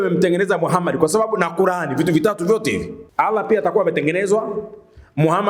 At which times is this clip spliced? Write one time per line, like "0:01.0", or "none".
0:03.0